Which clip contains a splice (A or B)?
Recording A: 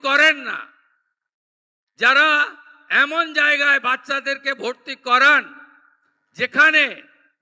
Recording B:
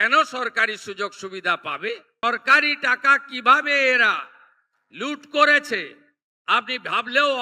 B